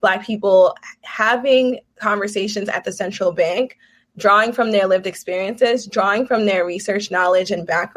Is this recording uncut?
yes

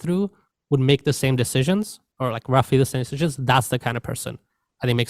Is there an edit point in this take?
no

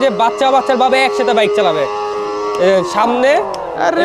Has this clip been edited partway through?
no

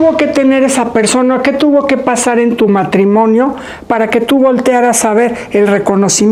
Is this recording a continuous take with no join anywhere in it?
yes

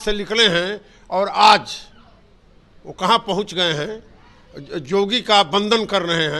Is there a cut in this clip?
no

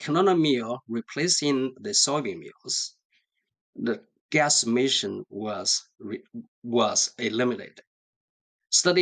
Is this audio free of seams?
yes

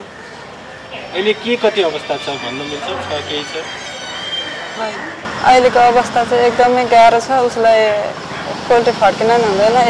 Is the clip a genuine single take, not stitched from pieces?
no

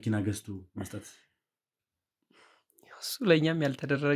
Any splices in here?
no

